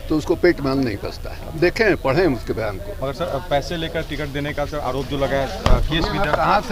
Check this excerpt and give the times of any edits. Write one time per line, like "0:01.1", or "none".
none